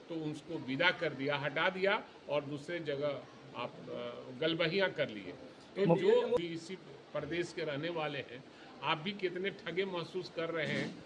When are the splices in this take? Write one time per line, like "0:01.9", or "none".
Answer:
0:06.4